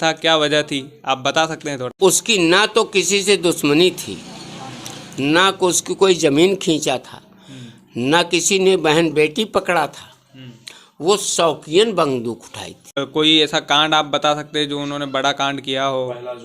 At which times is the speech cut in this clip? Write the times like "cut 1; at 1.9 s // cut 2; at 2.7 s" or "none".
cut 1; at 1.9 s // cut 2; at 13.0 s